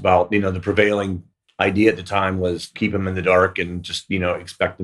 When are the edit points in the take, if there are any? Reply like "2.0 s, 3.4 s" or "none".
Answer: 2.7 s